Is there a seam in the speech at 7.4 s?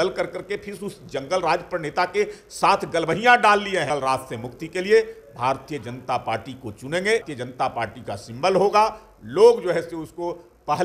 yes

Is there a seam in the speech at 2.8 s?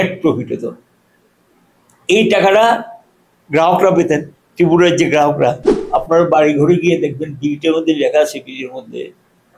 no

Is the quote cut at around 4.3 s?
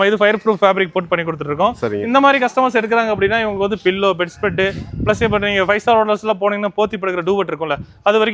no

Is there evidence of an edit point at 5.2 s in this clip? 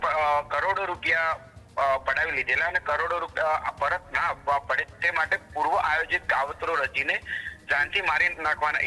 no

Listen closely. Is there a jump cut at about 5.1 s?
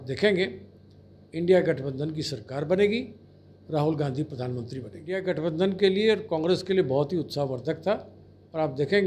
yes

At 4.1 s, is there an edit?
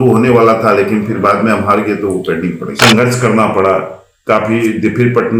no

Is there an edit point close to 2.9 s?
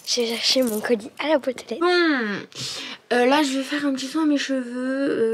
no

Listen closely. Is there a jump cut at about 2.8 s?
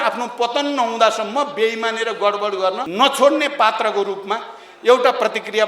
yes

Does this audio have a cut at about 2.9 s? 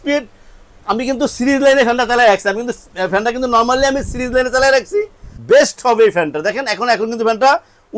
no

